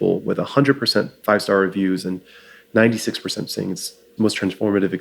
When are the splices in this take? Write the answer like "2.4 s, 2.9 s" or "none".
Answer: 1.1 s